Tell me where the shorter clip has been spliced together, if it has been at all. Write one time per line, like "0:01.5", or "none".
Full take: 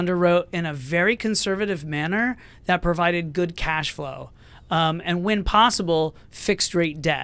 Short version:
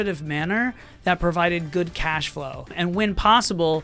0:02.7